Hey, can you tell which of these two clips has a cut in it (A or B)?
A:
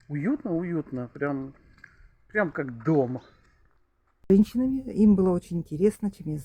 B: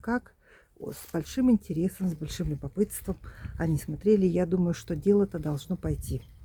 A